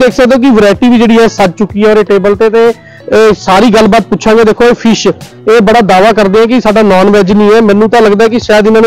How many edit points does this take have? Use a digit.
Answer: 0